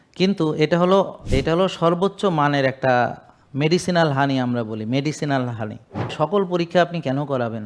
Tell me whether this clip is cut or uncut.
cut